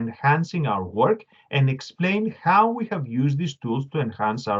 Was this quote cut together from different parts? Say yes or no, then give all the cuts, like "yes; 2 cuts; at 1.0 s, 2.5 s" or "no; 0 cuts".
no; 0 cuts